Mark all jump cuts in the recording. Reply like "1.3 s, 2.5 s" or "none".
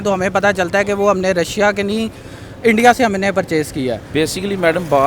4.0 s